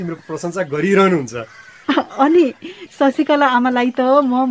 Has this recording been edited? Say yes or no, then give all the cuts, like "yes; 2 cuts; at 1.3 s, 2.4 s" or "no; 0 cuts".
no; 0 cuts